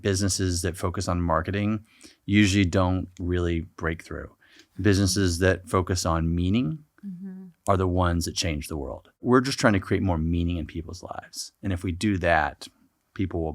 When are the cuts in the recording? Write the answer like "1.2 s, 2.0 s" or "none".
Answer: 9.2 s